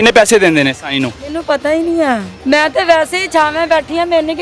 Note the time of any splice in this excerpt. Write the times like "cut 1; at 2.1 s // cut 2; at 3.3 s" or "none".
cut 1; at 2.3 s